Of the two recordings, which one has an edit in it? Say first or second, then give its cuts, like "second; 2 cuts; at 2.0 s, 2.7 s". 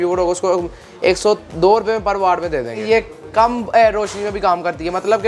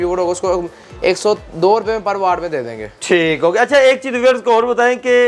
first; 1 cut; at 2.8 s